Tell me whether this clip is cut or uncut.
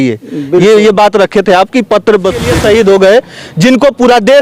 cut